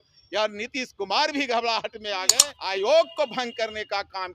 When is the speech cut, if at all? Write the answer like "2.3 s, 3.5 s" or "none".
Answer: 2.4 s